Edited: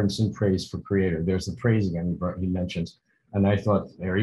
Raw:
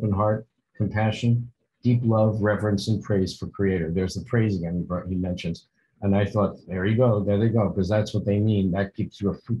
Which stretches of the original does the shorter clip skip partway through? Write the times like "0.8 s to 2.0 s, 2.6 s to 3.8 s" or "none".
none